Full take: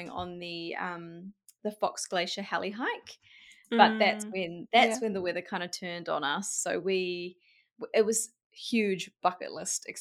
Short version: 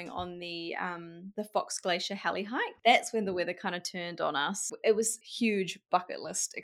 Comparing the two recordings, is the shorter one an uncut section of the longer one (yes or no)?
no